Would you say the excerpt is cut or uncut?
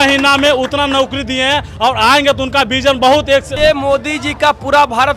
cut